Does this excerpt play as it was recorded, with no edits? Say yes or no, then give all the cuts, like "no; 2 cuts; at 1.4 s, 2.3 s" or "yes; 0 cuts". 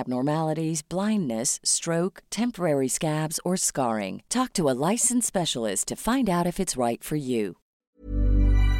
no; 1 cut; at 7.9 s